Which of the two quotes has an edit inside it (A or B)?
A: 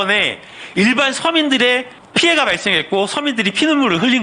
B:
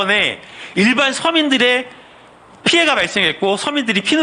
A